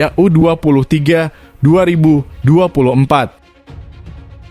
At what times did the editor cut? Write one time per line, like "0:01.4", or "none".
0:03.4